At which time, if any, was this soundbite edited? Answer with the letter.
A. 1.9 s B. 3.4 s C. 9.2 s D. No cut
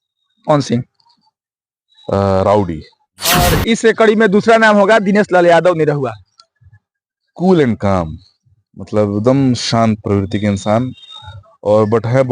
B